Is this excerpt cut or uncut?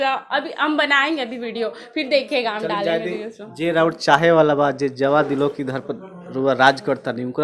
uncut